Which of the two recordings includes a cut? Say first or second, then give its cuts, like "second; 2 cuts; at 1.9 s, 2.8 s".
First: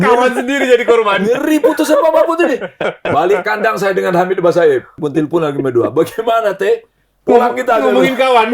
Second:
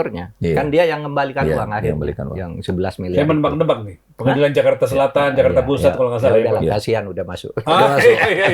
first; 1 cut; at 4.9 s